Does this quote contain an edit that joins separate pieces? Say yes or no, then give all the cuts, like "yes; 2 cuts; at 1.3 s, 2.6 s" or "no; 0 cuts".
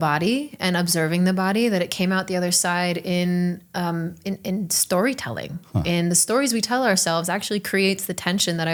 no; 0 cuts